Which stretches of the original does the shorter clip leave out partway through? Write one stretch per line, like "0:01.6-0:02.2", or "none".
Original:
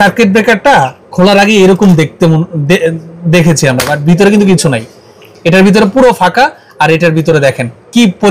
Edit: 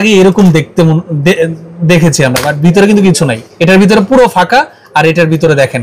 0:04.9-0:05.3